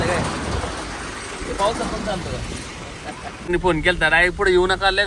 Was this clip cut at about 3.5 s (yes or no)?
yes